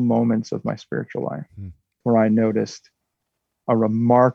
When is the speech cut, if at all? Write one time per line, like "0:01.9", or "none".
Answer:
0:01.9